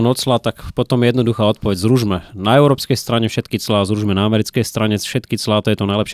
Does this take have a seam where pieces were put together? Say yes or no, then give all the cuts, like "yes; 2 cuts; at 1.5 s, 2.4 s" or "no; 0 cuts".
no; 0 cuts